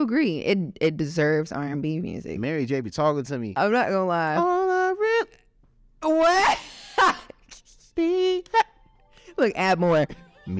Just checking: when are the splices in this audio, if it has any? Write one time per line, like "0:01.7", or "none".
0:02.3